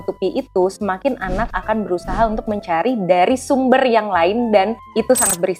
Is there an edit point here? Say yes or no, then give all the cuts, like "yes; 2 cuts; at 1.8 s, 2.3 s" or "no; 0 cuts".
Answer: no; 0 cuts